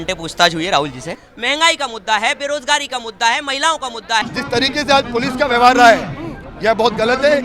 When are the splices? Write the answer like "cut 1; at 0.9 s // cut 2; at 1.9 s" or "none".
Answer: cut 1; at 1.2 s // cut 2; at 4.3 s